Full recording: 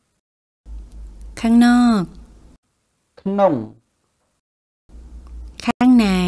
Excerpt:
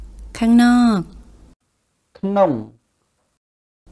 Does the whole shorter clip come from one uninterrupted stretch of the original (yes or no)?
yes